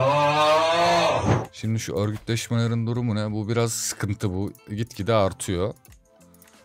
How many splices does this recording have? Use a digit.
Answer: 1